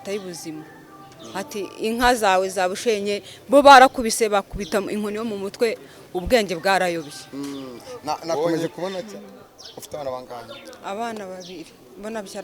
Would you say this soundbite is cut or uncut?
cut